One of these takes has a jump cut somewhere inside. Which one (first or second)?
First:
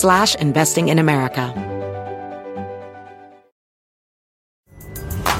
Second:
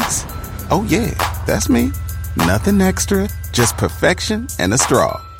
first